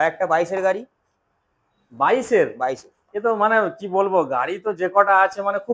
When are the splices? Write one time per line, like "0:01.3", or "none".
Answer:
none